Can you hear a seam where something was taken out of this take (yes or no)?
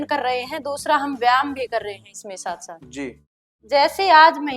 yes